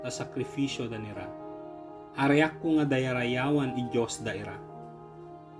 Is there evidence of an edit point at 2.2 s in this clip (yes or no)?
no